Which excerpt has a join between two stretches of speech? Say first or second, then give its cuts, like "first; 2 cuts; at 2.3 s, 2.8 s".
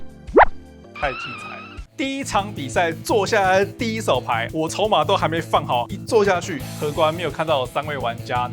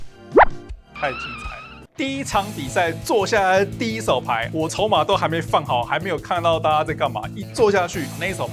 first; 2 cuts; at 5.9 s, 6.6 s